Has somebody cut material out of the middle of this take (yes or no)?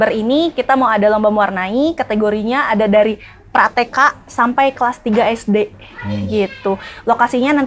no